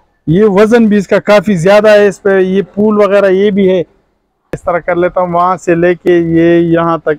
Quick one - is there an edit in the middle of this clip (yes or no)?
yes